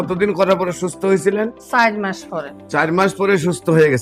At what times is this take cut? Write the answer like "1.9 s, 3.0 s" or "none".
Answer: none